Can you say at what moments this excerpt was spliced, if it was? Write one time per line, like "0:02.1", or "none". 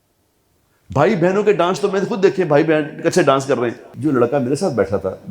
0:03.9